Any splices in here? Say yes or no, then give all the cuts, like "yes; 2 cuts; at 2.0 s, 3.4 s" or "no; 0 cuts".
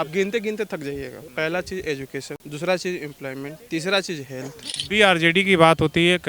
yes; 4 cuts; at 1.2 s, 2.4 s, 3.6 s, 4.7 s